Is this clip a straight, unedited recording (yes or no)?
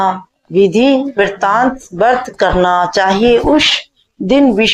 yes